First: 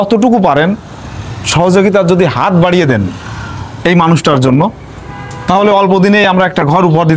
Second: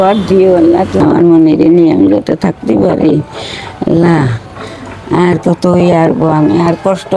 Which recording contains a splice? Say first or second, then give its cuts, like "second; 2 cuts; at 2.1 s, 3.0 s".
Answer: second; 1 cut; at 1.0 s